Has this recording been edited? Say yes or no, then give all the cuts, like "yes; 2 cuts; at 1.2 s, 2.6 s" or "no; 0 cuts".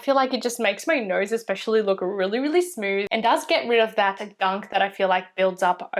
no; 0 cuts